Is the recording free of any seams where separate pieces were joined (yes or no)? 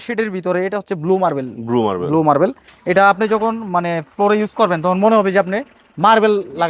yes